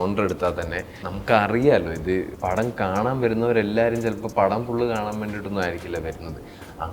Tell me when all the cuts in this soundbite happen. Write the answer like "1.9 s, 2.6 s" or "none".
1.0 s, 2.3 s